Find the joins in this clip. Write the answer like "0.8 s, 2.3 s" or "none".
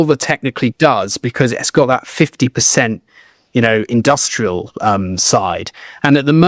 none